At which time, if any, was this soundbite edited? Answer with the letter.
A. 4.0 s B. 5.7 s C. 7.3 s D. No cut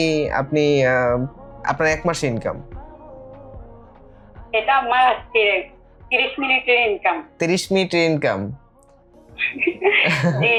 D